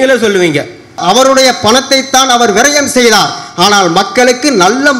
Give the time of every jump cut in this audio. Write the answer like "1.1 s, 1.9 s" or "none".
1.0 s